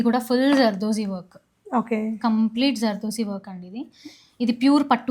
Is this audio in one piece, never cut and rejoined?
yes; 0 cuts

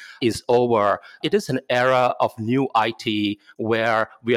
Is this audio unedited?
no; 1 cut; at 1.2 s

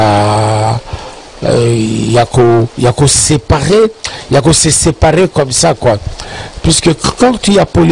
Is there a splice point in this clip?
no; 0 cuts

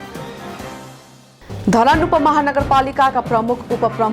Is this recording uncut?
no; 1 cut; at 1.2 s

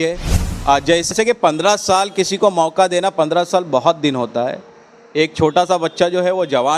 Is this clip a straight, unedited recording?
no; 1 cut; at 1.1 s

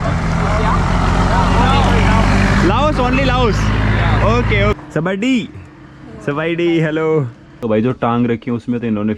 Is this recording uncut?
no; 2 cuts; at 4.8 s, 7.5 s

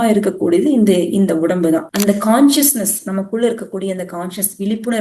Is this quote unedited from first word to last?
no; 1 cut; at 1.9 s

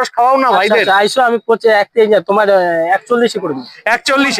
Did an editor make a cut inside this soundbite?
no; 0 cuts

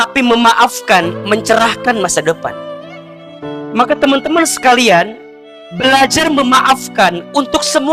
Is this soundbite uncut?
yes; 0 cuts

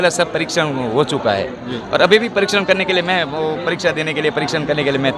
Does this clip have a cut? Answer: no; 0 cuts

